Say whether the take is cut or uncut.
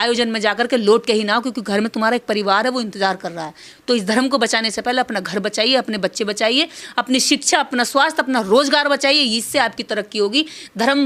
uncut